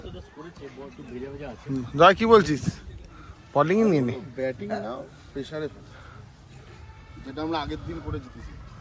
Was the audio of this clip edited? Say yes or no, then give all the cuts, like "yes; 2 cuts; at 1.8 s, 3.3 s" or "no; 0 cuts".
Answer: no; 0 cuts